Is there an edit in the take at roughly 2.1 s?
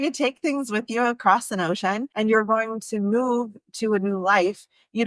yes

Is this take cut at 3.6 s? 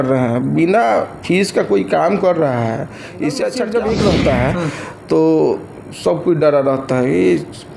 yes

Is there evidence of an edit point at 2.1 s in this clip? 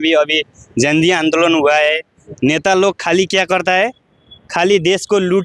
no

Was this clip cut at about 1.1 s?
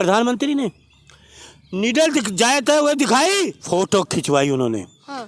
no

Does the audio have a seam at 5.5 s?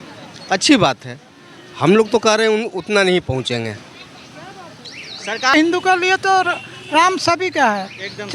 yes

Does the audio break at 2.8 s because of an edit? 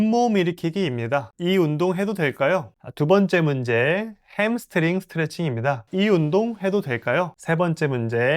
yes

